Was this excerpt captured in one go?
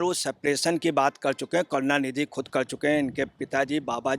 yes; 0 cuts

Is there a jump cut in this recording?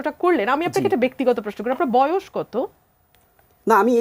no; 0 cuts

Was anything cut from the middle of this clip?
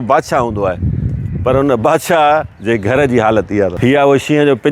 yes; 2 cuts; at 2.5 s, 3.7 s

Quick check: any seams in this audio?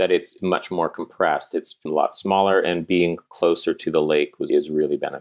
no; 0 cuts

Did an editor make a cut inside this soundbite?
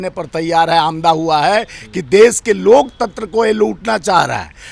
no; 0 cuts

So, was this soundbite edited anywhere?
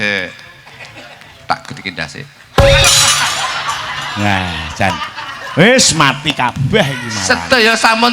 no; 0 cuts

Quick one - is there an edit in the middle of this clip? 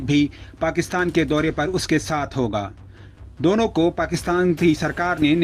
no; 0 cuts

